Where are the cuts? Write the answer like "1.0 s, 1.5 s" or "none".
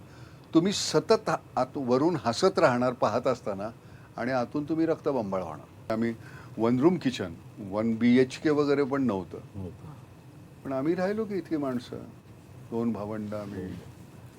5.9 s

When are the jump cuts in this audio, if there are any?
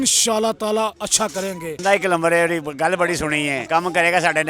1.8 s, 3.6 s

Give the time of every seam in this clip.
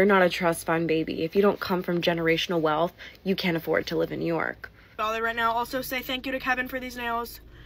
4.8 s

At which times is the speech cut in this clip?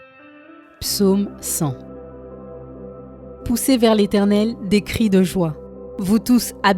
1.0 s

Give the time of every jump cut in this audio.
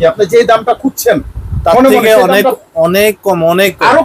none

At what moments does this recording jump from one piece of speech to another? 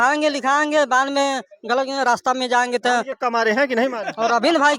3.1 s

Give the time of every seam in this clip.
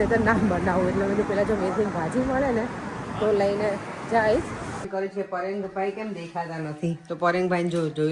4.9 s

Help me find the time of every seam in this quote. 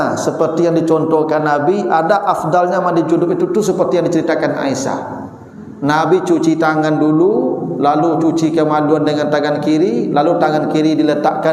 none

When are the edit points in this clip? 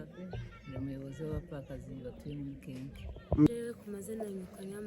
3.5 s

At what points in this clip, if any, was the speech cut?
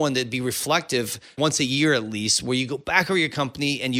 1.4 s

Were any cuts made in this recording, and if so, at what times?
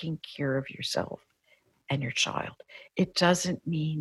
1.6 s

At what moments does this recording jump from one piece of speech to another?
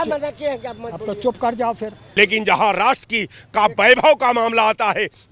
2.0 s

